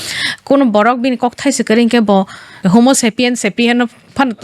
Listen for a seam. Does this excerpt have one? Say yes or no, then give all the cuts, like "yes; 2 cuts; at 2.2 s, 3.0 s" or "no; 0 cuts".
yes; 1 cut; at 2.6 s